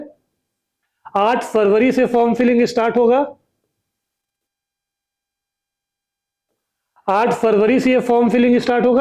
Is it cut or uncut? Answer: uncut